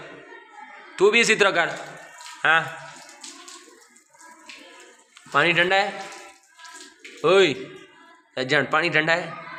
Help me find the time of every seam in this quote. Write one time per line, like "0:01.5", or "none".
none